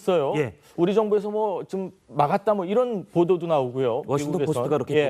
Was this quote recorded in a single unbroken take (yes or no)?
no